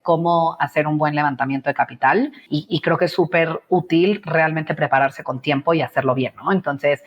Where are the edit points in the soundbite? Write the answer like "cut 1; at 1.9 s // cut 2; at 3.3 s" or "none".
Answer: cut 1; at 2.5 s